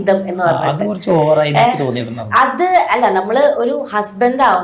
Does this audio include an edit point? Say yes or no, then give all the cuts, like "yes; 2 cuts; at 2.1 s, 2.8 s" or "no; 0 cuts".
no; 0 cuts